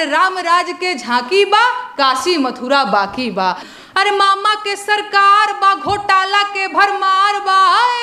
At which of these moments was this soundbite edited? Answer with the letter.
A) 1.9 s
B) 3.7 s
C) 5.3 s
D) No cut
B